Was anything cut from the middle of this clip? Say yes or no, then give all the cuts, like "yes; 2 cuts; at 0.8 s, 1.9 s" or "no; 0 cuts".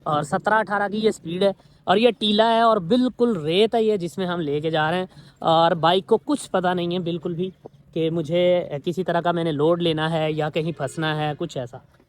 no; 0 cuts